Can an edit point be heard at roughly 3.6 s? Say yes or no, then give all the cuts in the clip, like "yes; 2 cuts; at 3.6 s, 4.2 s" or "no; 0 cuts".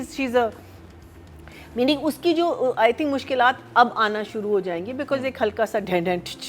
no; 0 cuts